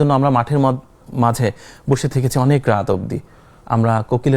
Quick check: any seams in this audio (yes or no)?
no